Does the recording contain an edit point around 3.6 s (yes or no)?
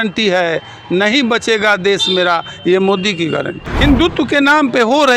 yes